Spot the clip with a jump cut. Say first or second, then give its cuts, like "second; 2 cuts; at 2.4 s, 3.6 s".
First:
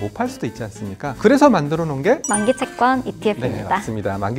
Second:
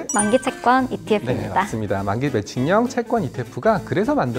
first; 1 cut; at 1.2 s